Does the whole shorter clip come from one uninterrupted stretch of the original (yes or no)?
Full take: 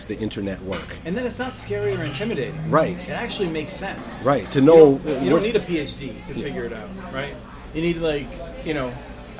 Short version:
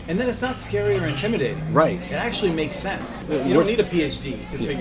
no